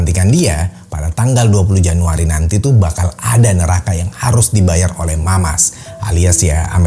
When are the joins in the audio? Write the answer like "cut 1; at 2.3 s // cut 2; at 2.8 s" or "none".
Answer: none

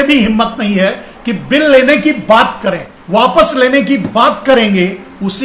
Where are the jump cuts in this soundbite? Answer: cut 1; at 3.0 s

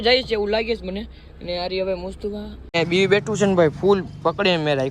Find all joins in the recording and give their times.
cut 1; at 2.7 s

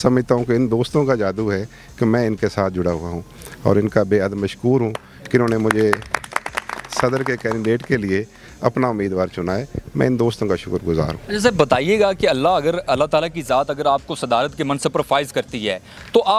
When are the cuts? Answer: none

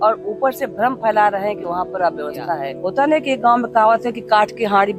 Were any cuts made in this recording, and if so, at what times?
cut 1; at 2.8 s

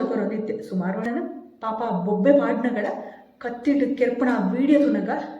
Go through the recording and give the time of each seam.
cut 1; at 1.1 s

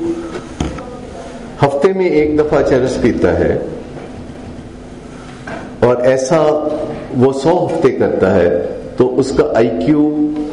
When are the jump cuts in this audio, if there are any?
none

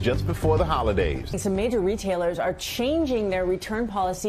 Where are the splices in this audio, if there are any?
none

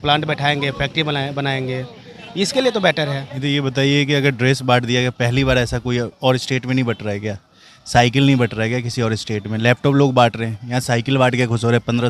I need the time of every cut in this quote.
cut 1; at 3.3 s

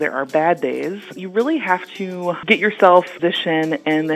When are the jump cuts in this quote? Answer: cut 1; at 1.2 s // cut 2; at 2.4 s // cut 3; at 3.1 s

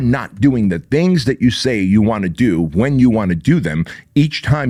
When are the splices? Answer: none

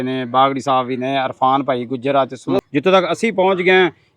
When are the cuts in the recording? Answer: cut 1; at 2.7 s

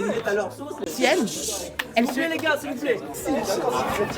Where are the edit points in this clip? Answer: cut 1; at 3.2 s

